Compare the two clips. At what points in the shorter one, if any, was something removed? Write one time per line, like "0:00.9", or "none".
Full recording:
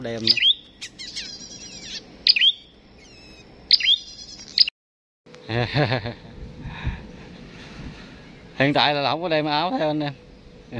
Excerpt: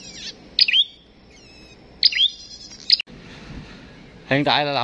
0:03.1